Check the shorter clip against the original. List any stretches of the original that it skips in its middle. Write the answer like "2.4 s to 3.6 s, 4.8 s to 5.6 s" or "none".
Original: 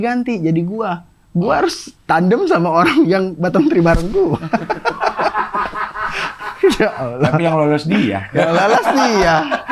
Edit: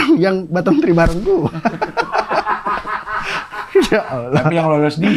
none